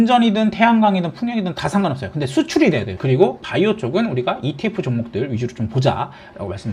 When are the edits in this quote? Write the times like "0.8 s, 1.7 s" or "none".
none